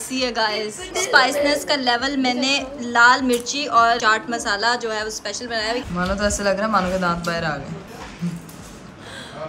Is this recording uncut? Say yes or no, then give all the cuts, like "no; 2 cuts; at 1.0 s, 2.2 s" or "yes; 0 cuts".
no; 4 cuts; at 0.9 s, 4.0 s, 5.9 s, 7.9 s